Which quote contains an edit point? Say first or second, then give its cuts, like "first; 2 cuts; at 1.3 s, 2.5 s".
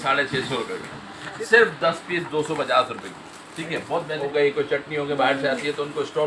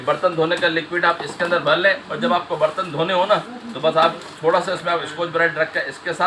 first; 2 cuts; at 1.3 s, 4.2 s